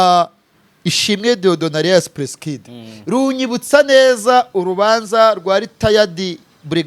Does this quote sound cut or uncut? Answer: uncut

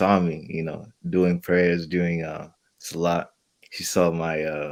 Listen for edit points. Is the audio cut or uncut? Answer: uncut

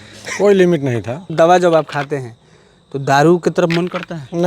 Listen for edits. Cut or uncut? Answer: cut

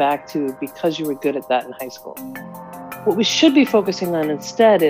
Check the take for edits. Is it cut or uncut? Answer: cut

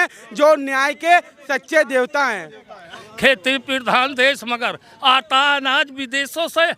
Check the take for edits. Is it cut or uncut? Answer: cut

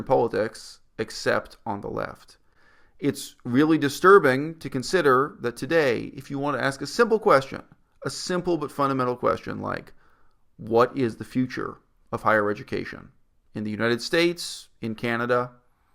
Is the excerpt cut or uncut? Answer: uncut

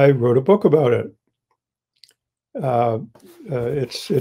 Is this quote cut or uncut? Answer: uncut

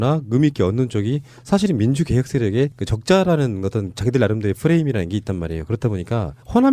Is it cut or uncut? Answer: cut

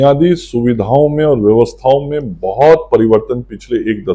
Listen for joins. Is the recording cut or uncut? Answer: uncut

